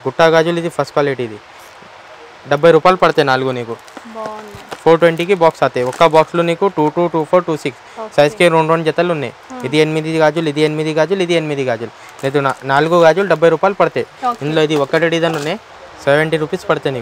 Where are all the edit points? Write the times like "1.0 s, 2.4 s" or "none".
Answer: none